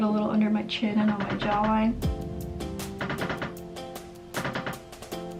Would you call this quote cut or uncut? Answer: uncut